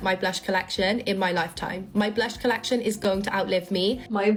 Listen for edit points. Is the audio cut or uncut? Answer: uncut